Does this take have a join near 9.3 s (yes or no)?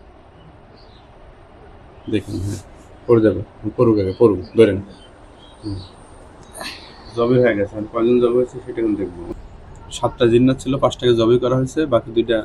yes